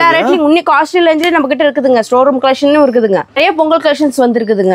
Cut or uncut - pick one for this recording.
cut